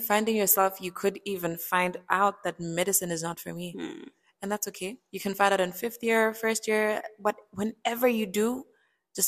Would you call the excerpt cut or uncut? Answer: uncut